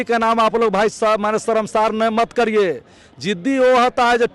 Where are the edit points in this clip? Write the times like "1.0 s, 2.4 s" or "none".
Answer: none